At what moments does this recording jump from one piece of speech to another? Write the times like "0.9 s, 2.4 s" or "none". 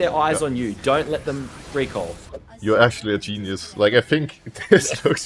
2.1 s